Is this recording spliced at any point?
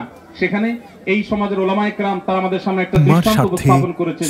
no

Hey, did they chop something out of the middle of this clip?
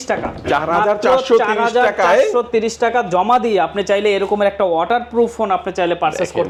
no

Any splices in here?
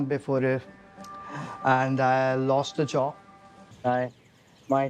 yes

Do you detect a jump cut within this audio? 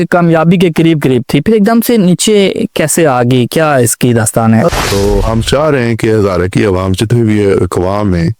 yes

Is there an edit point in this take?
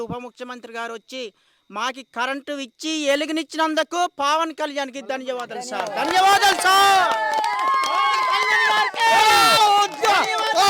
no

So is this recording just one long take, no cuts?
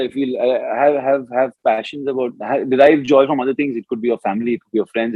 yes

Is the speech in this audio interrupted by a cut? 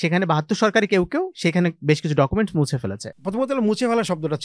yes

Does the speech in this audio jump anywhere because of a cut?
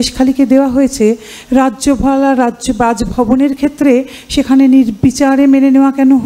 no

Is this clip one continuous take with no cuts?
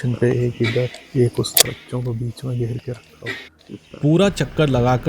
no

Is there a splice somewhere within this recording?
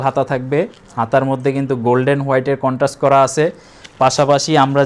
no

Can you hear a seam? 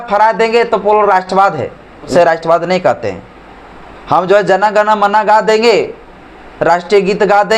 yes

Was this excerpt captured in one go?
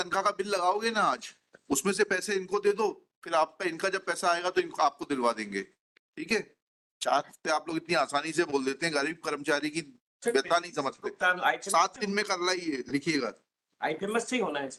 yes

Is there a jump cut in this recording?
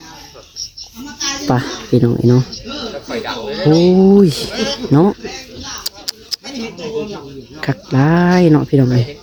no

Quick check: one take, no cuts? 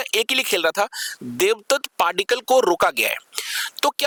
yes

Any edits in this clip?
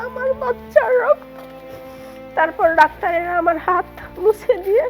no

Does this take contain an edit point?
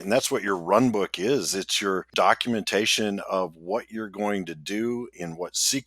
yes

